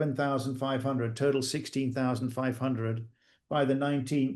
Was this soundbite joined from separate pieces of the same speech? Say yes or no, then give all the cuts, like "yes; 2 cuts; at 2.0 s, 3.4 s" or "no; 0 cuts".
no; 0 cuts